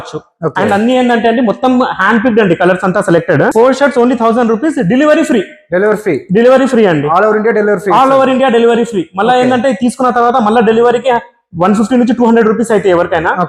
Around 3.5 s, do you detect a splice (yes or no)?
yes